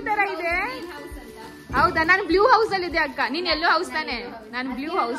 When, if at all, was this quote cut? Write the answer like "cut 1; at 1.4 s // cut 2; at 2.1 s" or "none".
none